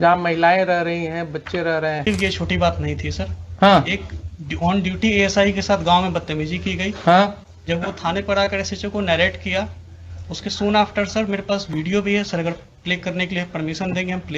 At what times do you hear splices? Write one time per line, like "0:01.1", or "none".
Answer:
0:02.1